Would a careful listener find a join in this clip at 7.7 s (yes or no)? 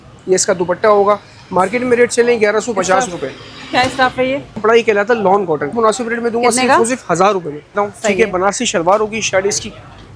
yes